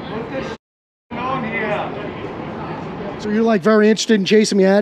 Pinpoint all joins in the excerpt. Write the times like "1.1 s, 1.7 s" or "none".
3.3 s